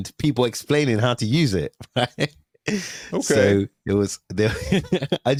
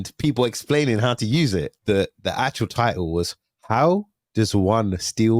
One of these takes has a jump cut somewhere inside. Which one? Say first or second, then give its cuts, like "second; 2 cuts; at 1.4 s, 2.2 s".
second; 1 cut; at 1.7 s